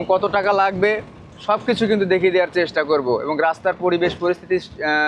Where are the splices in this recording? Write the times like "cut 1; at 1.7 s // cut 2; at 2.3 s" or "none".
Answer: none